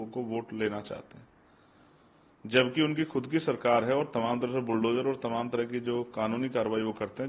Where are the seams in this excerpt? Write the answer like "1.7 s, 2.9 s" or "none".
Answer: none